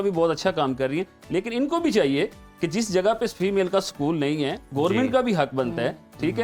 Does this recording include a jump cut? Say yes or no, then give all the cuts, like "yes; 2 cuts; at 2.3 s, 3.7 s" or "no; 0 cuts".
no; 0 cuts